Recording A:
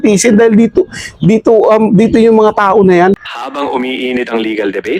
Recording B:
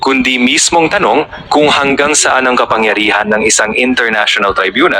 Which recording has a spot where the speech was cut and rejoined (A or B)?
A